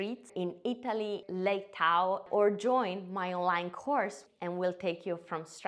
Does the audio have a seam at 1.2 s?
yes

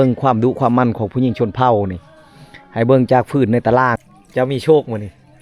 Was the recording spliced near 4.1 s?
yes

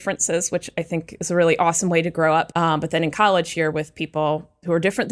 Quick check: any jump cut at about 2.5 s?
yes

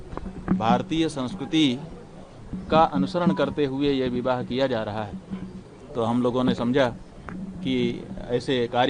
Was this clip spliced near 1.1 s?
no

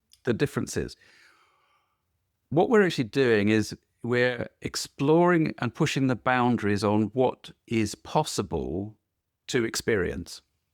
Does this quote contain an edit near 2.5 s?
yes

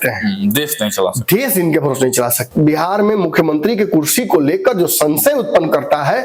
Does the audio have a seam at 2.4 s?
yes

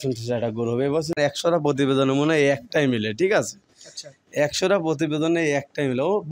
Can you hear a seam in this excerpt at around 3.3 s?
no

